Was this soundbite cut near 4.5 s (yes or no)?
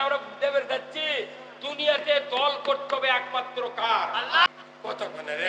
yes